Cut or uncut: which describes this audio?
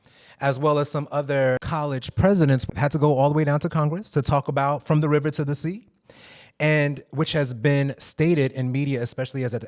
cut